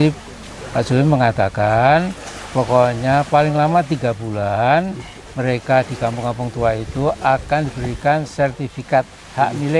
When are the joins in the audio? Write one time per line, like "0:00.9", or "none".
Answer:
none